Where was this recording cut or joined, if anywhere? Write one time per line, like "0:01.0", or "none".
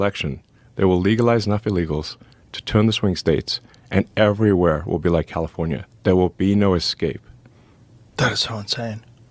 none